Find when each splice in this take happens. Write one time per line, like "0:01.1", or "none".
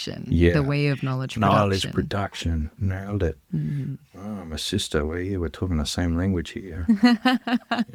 none